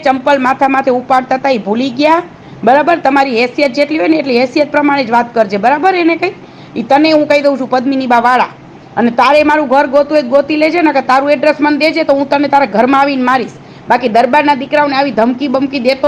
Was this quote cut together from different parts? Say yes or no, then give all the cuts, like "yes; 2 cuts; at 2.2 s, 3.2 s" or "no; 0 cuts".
no; 0 cuts